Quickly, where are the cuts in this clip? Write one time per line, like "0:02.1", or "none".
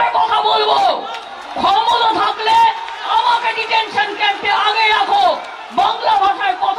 none